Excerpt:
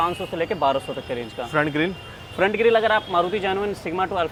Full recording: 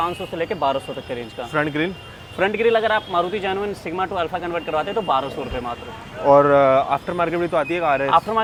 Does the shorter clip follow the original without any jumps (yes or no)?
yes